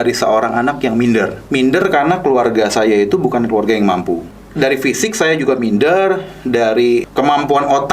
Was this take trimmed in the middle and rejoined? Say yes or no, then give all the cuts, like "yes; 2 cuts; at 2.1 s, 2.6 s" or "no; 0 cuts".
yes; 3 cuts; at 1.4 s, 4.4 s, 7.1 s